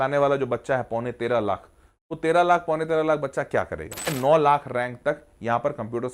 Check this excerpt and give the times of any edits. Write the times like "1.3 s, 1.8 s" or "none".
4.1 s